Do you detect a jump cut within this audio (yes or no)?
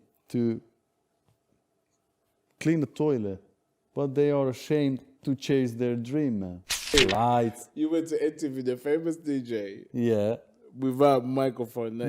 yes